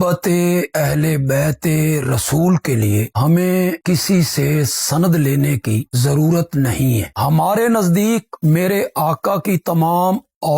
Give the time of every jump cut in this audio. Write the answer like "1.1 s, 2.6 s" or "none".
7.1 s